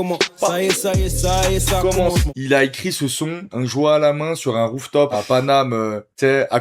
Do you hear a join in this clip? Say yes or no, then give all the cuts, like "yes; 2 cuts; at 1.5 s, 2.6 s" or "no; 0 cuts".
yes; 3 cuts; at 2.3 s, 3.4 s, 5.1 s